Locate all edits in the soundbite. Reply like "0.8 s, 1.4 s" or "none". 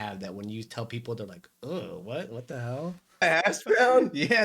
3.2 s